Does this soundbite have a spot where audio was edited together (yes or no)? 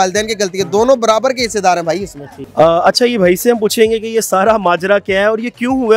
no